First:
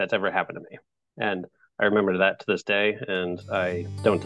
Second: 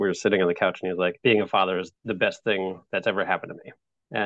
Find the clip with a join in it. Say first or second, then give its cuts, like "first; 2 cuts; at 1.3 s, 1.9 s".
second; 2 cuts; at 1.2 s, 1.9 s